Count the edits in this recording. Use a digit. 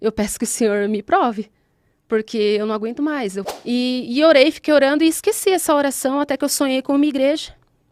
1